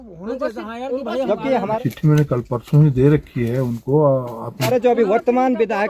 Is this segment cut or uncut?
cut